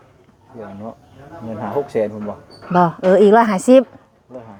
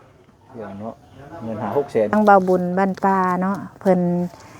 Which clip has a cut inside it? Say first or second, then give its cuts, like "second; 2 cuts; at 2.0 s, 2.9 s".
second; 1 cut; at 2.1 s